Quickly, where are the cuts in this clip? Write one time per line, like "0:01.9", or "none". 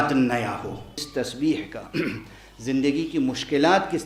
0:01.1